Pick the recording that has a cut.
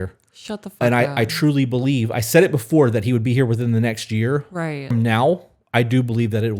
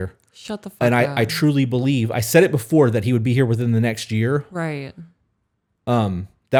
first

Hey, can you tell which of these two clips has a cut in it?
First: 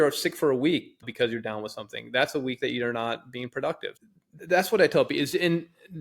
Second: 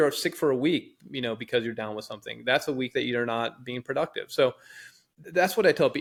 first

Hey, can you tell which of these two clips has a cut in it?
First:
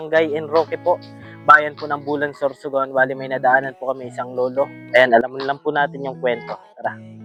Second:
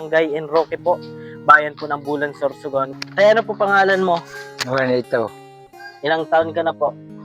second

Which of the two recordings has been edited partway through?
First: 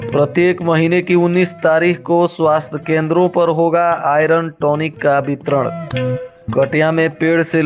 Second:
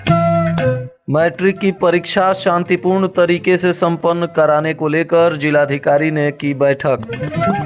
second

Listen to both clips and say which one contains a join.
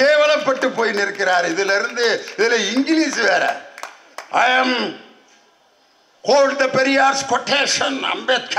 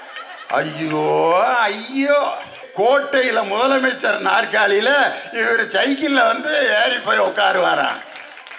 second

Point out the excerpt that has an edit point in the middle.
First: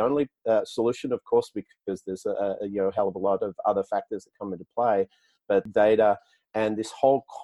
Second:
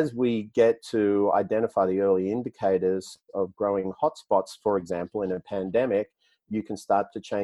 first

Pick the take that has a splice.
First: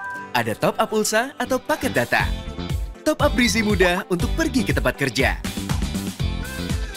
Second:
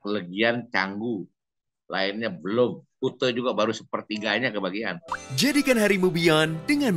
second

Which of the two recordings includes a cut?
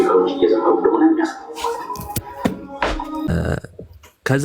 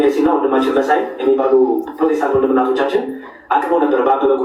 first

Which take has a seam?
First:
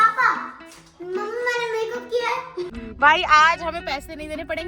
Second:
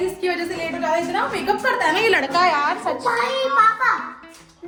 first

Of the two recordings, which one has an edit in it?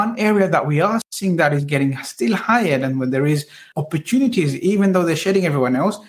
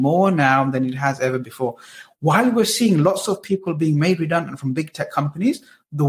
first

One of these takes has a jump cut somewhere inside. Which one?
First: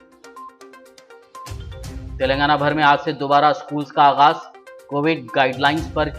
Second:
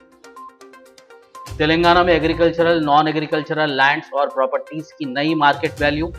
second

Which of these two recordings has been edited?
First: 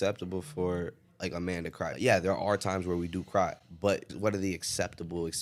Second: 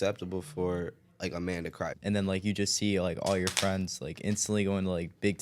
second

